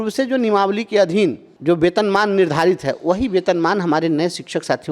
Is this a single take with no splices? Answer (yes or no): no